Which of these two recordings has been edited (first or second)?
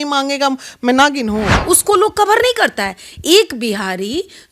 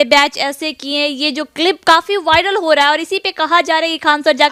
first